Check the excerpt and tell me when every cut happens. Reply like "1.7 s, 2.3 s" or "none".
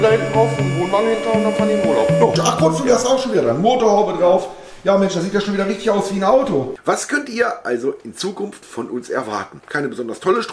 2.3 s, 6.7 s, 9.6 s